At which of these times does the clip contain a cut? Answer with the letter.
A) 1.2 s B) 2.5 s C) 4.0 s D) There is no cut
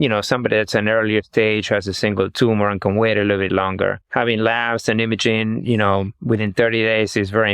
C